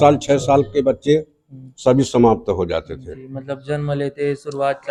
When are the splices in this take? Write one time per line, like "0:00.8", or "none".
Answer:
none